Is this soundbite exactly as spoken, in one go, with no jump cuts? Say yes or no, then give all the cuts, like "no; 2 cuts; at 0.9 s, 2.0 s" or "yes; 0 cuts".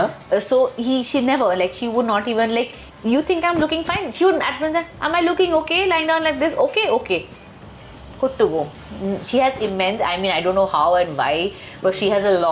yes; 0 cuts